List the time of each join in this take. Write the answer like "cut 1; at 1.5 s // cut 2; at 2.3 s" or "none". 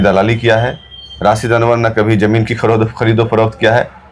none